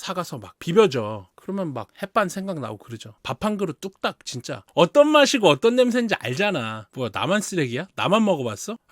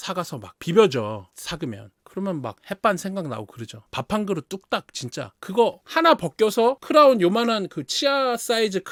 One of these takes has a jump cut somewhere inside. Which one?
first; 2 cuts; at 1.3 s, 4.6 s

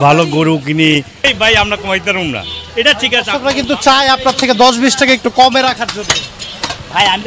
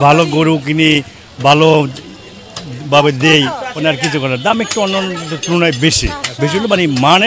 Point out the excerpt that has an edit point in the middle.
first; 1 cut; at 1.3 s

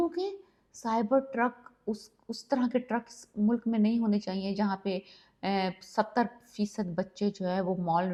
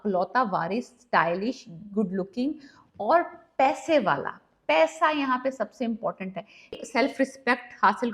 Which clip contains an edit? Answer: second; 1 cut; at 6.8 s

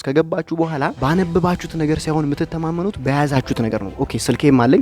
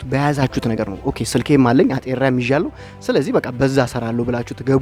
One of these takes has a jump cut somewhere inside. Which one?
first; 1 cut; at 1.0 s

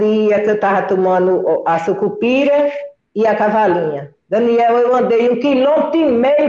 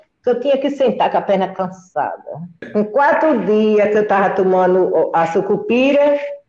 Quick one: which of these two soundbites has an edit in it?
second; 1 cut; at 2.5 s

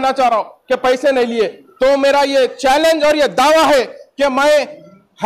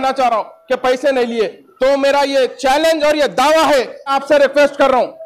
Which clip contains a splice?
second; 1 cut; at 4.1 s

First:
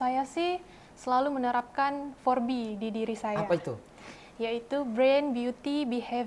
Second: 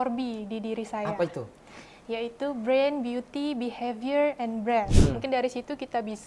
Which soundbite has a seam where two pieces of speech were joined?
second; 1 cut; at 5.0 s

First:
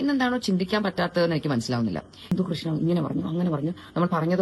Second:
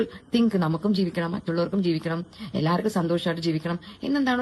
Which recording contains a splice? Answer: first; 1 cut; at 2.3 s

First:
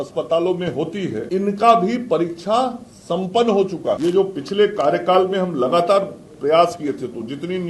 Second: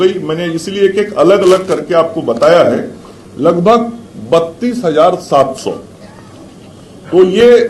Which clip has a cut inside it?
first; 2 cuts; at 1.2 s, 4.0 s

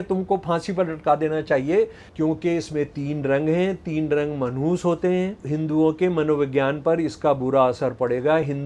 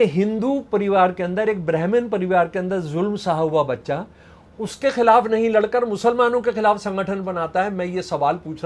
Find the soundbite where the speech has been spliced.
first; 2 cuts; at 2.0 s, 5.4 s

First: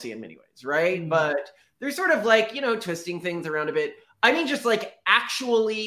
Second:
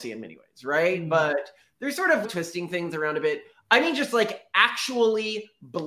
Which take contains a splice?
second; 1 cut; at 2.2 s

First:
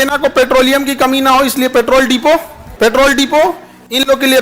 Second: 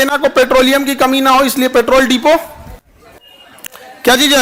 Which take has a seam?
first; 1 cut; at 2.6 s

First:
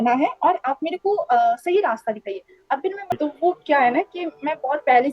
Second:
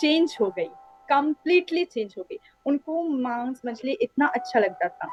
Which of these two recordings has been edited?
first; 1 cut; at 3.1 s

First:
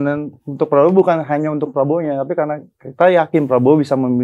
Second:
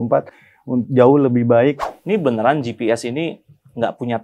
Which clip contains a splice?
second; 1 cut; at 1.9 s

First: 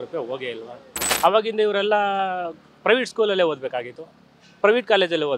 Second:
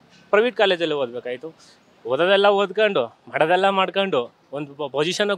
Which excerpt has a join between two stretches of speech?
first; 1 cut; at 1.1 s

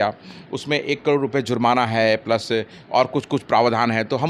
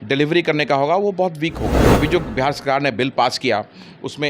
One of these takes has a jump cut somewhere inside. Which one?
second; 1 cut; at 1.8 s

